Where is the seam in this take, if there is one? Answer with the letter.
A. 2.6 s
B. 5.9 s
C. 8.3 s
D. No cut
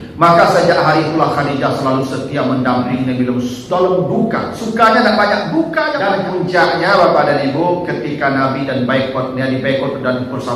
B